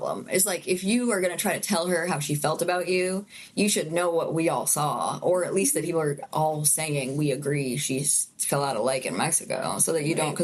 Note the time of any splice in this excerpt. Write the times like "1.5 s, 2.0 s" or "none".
none